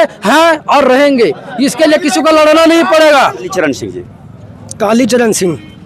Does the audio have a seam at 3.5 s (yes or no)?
yes